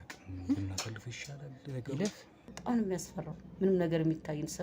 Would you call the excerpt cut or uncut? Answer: cut